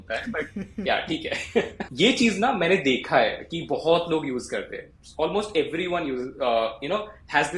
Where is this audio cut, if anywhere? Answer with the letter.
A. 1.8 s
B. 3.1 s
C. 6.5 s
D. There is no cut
A